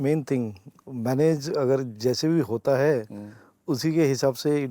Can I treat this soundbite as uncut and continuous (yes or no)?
yes